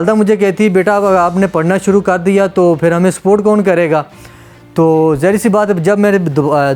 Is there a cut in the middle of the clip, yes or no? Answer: no